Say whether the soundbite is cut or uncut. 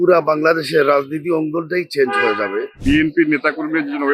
cut